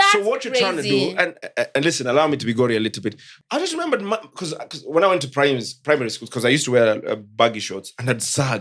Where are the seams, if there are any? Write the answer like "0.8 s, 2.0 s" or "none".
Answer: 3.4 s